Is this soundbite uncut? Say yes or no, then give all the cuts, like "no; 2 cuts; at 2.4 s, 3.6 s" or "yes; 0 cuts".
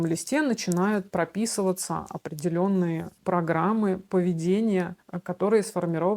yes; 0 cuts